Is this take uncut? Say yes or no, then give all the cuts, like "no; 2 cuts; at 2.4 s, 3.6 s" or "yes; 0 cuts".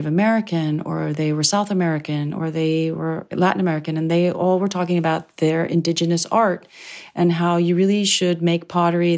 no; 1 cut; at 3.3 s